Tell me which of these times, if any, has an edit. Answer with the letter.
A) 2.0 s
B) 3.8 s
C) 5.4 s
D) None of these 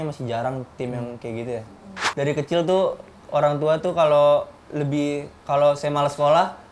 A